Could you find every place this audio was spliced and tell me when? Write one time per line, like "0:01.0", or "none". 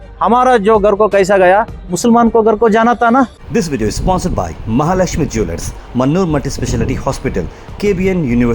0:03.4